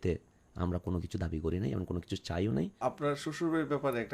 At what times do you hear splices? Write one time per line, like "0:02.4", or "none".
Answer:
0:02.8